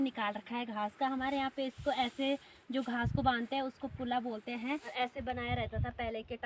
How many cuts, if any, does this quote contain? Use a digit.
1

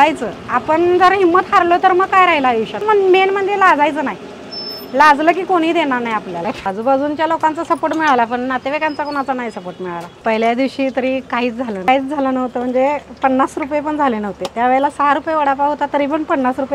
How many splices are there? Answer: 4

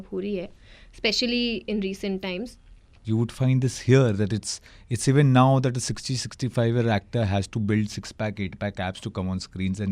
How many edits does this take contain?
1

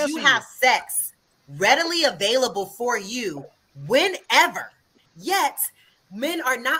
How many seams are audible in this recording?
0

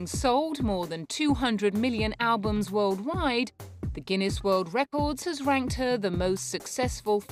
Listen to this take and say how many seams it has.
1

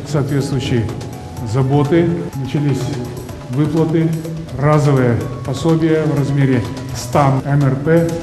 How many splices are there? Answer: 1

